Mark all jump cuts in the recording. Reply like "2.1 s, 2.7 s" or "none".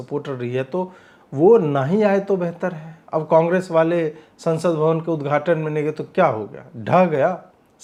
none